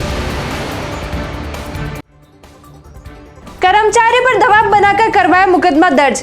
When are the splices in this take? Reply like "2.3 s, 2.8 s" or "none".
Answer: 3.3 s